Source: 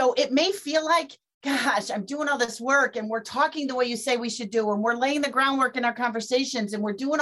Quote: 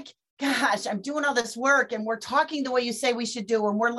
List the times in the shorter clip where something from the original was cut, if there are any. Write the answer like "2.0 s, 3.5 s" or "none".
none